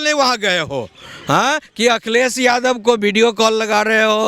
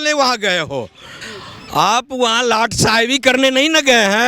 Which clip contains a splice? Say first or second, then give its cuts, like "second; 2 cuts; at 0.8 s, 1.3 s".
second; 1 cut; at 1.1 s